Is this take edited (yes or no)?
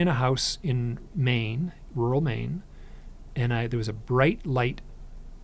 no